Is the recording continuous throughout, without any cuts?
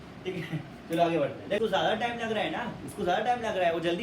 no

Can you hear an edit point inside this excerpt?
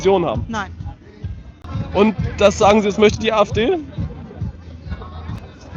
yes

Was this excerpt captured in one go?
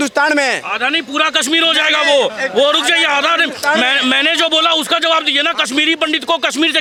yes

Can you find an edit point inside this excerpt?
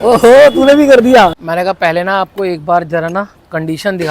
yes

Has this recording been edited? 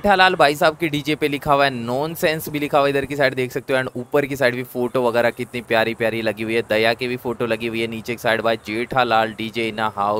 no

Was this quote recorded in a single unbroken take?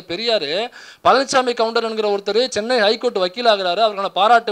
yes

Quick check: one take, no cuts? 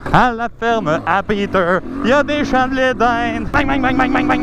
yes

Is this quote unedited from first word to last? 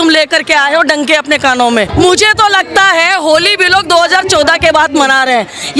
no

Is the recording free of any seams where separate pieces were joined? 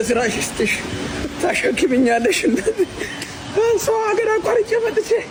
yes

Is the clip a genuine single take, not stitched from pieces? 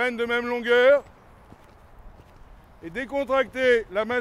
no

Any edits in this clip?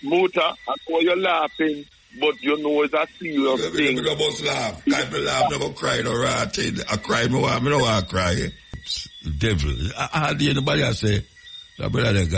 yes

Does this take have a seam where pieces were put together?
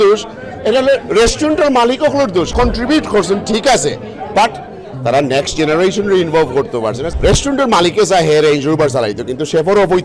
yes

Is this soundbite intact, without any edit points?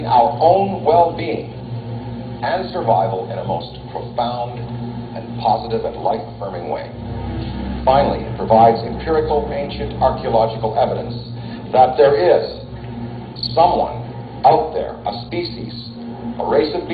yes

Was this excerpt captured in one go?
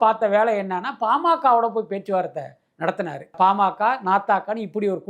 no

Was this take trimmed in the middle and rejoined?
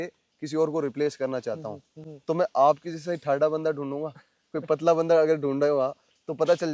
no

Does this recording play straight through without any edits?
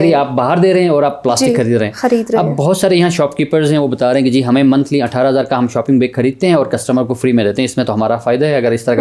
yes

